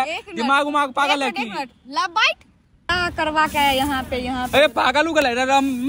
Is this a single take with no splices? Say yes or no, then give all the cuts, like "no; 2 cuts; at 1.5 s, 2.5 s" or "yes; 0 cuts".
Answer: no; 1 cut; at 2.9 s